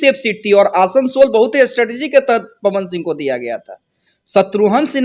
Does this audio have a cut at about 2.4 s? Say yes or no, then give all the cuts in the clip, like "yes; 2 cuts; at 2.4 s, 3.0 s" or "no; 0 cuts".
no; 0 cuts